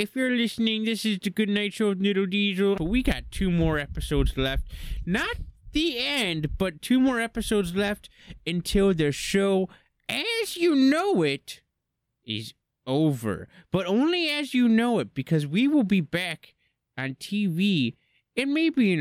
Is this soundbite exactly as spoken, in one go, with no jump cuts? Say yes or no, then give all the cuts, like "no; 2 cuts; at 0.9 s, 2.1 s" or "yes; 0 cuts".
no; 1 cut; at 2.8 s